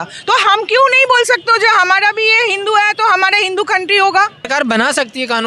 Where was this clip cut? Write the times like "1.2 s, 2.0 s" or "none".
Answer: 4.4 s